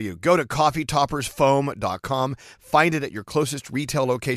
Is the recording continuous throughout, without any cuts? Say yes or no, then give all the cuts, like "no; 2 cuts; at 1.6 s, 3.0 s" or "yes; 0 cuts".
yes; 0 cuts